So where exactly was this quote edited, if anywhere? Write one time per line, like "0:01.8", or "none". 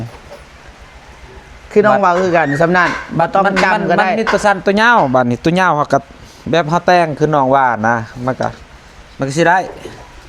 none